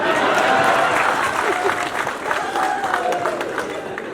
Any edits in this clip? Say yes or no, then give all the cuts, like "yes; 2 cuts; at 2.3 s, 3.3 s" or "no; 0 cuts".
no; 0 cuts